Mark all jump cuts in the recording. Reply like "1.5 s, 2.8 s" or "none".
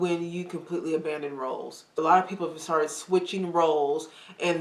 1.9 s